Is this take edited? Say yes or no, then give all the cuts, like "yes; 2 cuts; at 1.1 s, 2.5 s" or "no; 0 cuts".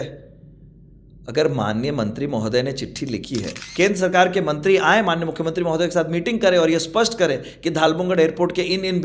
yes; 1 cut; at 3.6 s